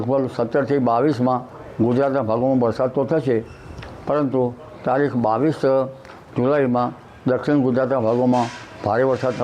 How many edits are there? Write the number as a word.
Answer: zero